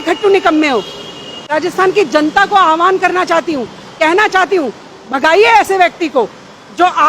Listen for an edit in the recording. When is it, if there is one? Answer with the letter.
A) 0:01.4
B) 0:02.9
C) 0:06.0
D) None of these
A